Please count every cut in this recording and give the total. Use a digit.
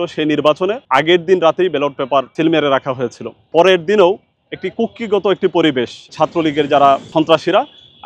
5